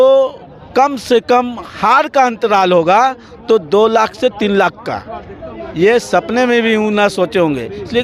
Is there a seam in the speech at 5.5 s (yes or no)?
no